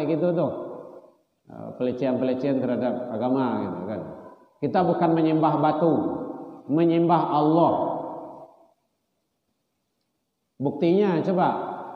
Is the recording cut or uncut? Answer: uncut